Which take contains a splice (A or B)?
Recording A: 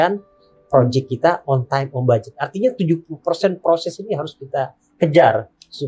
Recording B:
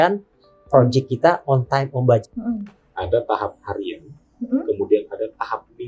B